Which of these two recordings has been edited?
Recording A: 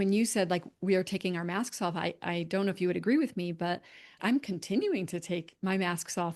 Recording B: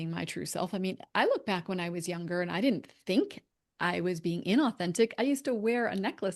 A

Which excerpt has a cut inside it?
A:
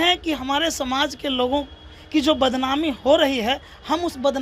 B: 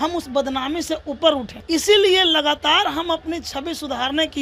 B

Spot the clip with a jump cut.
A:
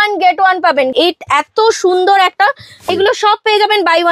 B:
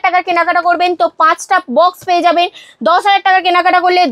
A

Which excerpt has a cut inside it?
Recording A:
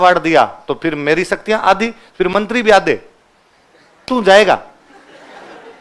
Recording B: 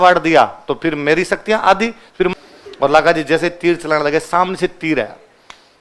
B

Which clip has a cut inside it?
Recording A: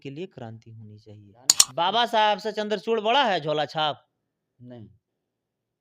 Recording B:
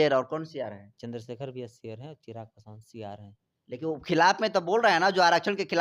A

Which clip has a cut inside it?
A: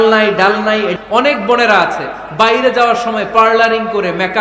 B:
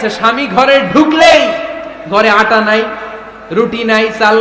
A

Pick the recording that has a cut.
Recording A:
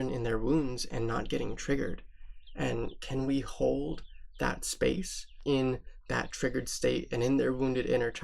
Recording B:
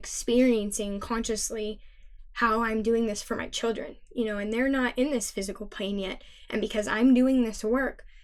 A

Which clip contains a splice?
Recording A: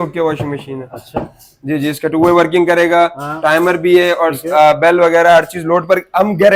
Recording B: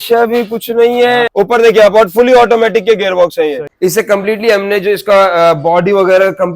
B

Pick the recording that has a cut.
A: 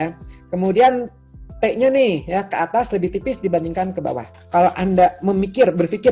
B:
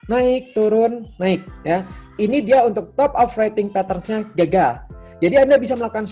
A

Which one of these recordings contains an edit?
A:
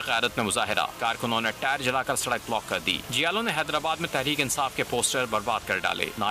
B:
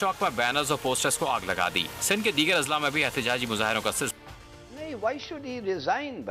B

